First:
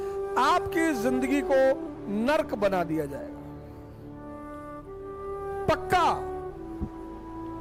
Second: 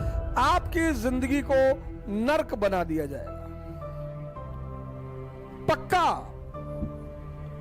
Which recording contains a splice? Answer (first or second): second